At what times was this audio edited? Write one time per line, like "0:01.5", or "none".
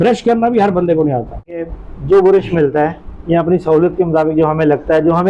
0:01.8